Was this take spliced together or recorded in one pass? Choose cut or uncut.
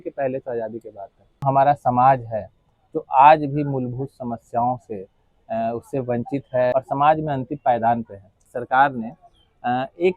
cut